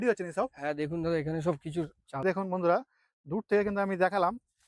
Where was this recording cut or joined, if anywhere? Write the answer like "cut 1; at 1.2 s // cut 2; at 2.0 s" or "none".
cut 1; at 2.2 s